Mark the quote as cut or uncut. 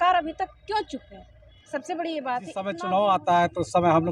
cut